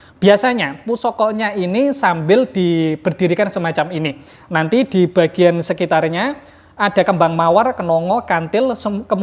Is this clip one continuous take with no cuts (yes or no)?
yes